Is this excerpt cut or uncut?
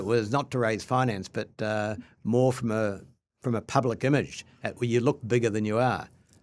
uncut